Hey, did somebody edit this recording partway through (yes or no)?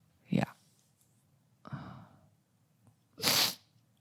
no